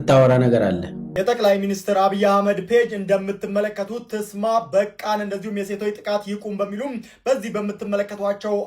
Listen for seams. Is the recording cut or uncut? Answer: cut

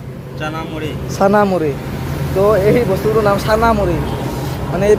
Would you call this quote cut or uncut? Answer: uncut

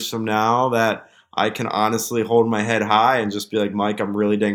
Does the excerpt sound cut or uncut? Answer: uncut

